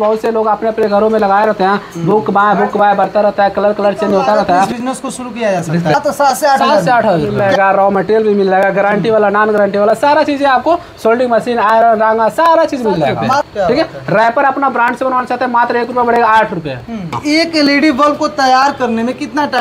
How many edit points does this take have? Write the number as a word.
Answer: five